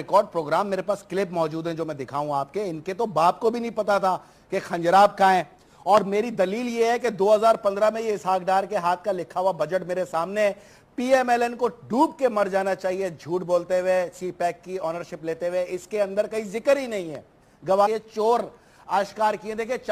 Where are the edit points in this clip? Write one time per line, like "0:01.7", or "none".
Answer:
none